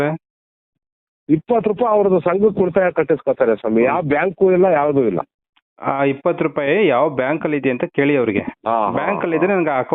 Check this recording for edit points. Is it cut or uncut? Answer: cut